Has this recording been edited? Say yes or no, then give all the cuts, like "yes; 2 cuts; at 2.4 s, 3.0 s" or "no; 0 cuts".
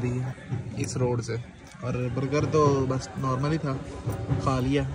no; 0 cuts